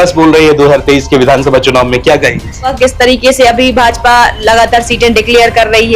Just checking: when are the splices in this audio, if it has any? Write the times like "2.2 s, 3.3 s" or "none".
2.7 s